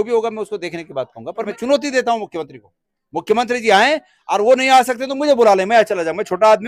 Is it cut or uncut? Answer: cut